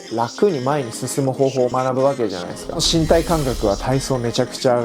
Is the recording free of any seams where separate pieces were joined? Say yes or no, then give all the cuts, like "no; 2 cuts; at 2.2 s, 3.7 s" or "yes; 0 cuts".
no; 1 cut; at 2.8 s